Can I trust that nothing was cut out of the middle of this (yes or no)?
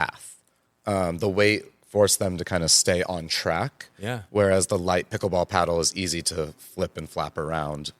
yes